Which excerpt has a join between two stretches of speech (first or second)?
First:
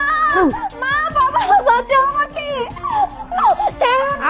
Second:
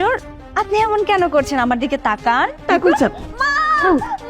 second